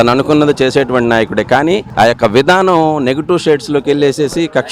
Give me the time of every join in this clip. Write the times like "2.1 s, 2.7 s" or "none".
none